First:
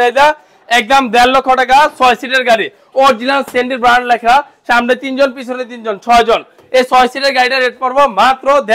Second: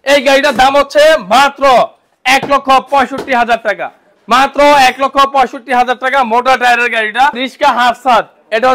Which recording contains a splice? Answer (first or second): second